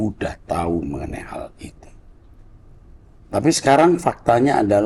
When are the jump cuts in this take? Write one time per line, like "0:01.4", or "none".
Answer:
none